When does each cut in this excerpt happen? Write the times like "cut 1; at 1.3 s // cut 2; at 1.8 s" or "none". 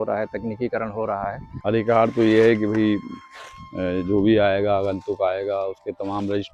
cut 1; at 1.5 s